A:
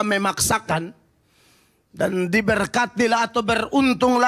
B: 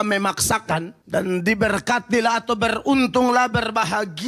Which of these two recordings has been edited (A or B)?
B